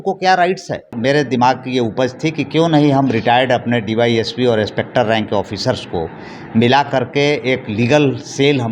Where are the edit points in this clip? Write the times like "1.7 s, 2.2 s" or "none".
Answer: 0.9 s

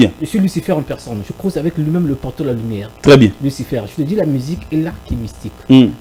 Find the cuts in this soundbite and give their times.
none

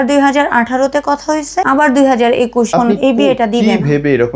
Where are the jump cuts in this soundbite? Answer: 1.6 s, 2.7 s

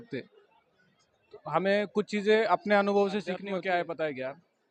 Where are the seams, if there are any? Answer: 3.4 s

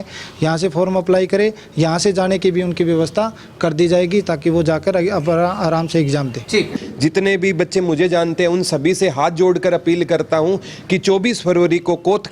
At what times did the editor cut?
6.7 s

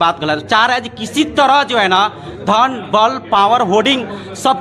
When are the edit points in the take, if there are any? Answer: none

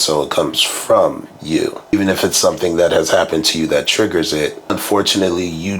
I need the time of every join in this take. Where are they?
1.9 s, 4.7 s

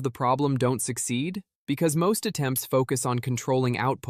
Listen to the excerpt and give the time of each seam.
1.5 s

